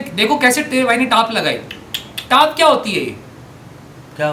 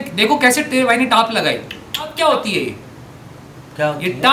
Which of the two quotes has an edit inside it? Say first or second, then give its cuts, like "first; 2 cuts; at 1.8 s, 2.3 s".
second; 1 cut; at 2.1 s